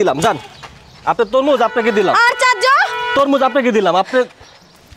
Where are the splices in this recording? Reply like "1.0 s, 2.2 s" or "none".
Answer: none